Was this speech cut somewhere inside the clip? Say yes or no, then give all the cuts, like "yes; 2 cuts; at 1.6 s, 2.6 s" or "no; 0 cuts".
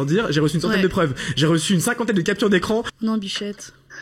yes; 1 cut; at 2.9 s